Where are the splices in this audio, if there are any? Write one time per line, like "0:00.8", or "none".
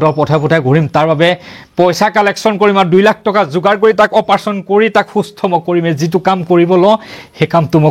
none